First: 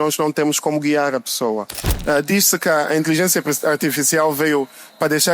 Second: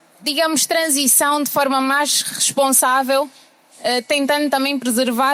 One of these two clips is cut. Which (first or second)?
first